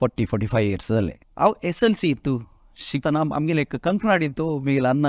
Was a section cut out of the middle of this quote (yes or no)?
yes